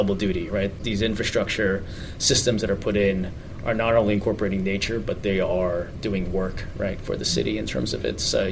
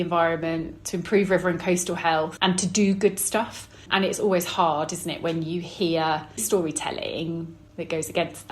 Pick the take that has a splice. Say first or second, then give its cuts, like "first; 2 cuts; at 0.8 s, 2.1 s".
second; 2 cuts; at 2.3 s, 6.4 s